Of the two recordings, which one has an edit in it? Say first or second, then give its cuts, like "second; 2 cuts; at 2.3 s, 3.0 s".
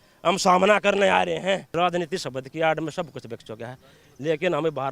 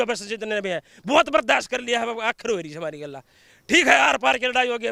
first; 1 cut; at 1.7 s